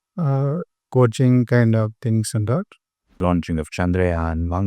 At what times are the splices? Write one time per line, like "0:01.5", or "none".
0:03.2